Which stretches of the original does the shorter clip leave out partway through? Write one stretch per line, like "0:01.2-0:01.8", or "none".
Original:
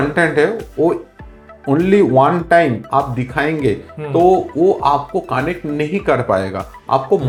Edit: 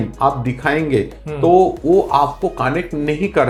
none